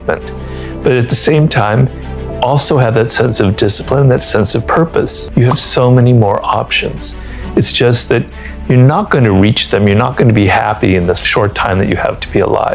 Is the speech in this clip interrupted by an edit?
yes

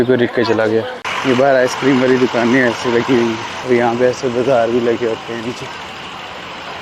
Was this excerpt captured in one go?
no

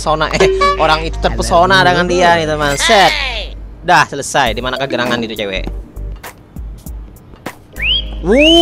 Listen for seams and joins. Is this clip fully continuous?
yes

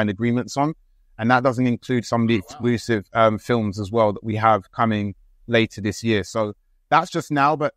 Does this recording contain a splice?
no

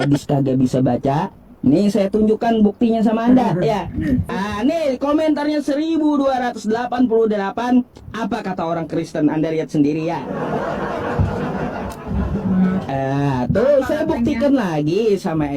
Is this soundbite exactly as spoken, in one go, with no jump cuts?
no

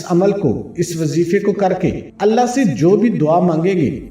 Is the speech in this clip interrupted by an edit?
yes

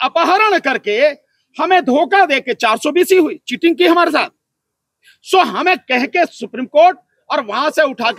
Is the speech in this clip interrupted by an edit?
no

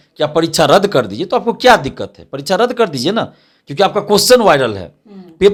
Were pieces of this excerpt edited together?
no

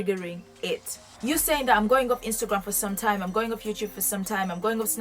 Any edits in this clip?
yes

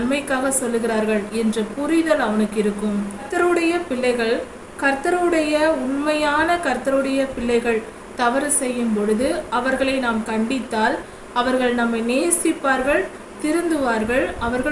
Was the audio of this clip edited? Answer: yes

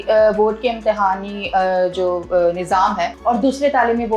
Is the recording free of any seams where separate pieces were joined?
no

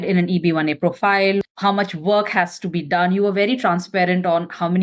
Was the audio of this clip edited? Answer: no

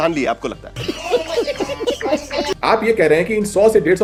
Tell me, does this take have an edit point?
no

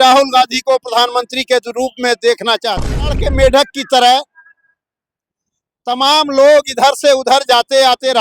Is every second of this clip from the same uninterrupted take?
no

